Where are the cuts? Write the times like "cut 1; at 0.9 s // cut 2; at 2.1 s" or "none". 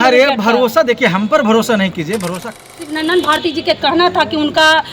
cut 1; at 2.5 s